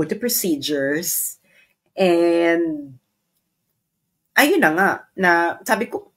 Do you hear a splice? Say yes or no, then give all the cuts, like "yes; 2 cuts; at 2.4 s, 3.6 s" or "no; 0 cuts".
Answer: no; 0 cuts